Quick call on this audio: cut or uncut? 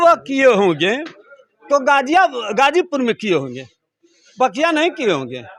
uncut